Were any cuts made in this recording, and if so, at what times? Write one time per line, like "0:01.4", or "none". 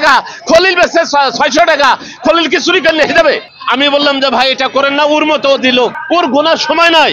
0:03.5
0:06.0